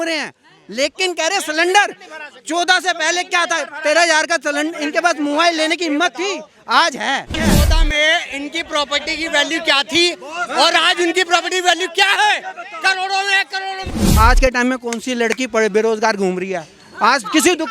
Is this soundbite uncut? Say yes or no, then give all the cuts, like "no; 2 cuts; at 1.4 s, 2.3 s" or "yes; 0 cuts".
no; 2 cuts; at 7.4 s, 13.9 s